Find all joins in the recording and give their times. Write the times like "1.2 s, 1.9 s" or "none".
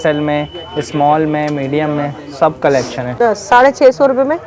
3.2 s